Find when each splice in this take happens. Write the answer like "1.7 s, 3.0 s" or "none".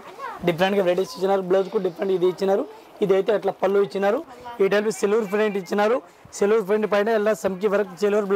4.4 s

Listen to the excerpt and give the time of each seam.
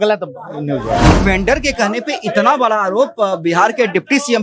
1.1 s

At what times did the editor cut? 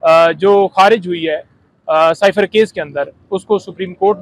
none

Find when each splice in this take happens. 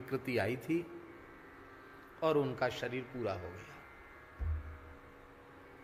none

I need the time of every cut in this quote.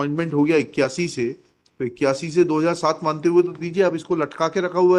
none

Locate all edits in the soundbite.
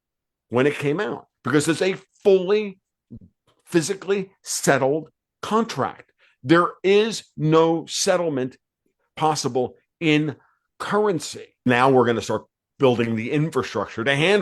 11.7 s

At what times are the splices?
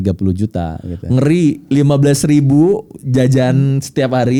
none

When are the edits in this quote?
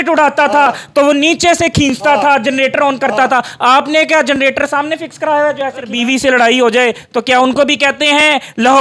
5.9 s

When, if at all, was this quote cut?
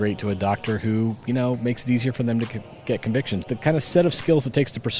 3.5 s

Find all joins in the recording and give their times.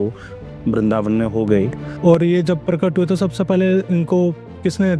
1.8 s

